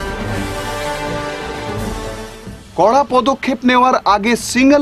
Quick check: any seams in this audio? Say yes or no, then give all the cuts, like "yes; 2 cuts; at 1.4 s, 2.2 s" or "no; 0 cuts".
yes; 1 cut; at 2.0 s